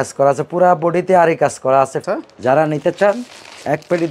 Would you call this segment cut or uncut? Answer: cut